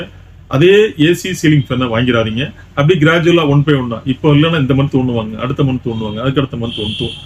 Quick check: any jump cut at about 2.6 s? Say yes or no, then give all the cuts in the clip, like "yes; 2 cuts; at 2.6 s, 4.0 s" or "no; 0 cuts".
no; 0 cuts